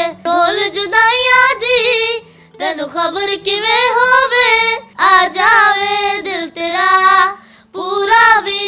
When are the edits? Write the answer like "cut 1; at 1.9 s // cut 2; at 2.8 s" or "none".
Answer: none